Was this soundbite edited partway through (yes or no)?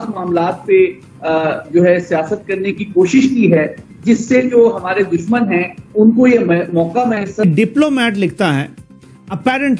yes